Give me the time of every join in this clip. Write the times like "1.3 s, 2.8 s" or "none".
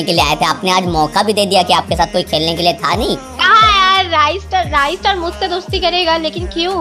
none